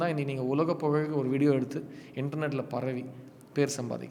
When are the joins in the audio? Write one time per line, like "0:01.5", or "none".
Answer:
none